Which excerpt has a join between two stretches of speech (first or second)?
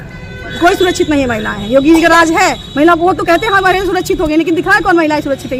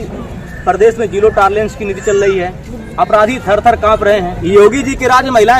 second